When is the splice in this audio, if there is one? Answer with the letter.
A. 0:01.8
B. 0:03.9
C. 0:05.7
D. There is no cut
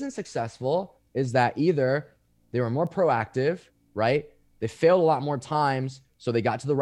D